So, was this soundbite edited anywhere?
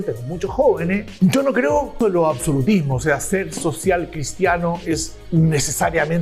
yes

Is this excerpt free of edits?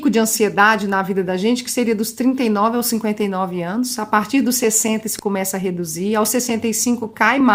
yes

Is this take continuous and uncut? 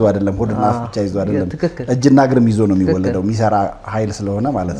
yes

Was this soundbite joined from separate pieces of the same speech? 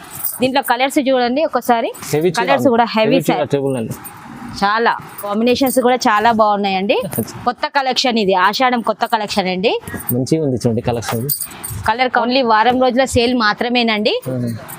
yes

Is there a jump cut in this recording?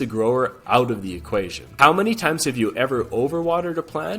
yes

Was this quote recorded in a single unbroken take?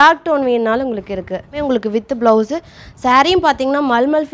no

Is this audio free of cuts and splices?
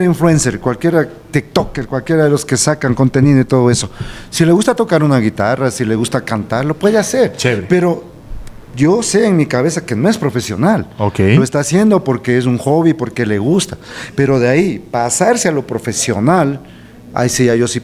yes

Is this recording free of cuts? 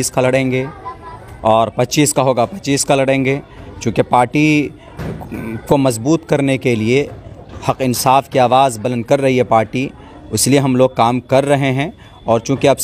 yes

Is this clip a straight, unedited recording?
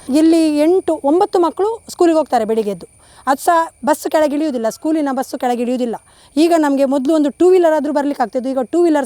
yes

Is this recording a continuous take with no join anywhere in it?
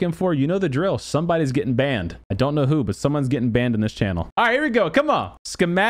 no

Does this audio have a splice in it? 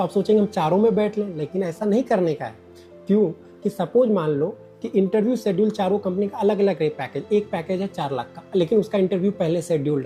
no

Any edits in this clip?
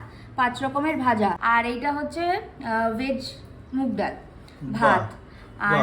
yes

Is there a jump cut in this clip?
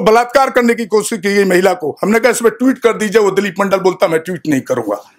no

